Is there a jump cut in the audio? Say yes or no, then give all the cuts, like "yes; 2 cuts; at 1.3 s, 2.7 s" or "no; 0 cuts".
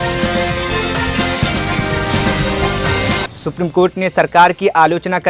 no; 0 cuts